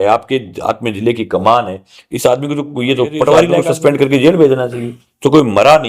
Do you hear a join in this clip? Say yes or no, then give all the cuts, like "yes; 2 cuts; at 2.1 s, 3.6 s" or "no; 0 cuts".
yes; 1 cut; at 3.7 s